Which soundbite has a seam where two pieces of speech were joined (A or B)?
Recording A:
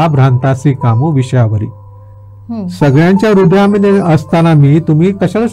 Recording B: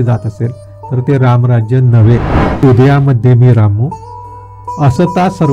B